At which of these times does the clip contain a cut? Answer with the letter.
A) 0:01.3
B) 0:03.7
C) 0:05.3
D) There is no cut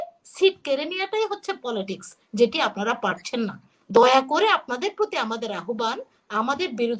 D